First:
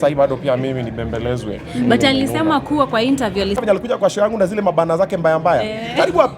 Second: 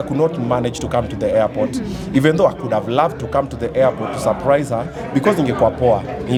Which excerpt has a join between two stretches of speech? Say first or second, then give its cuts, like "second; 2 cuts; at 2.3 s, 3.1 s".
first; 1 cut; at 3.6 s